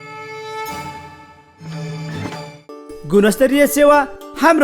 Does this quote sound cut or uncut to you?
cut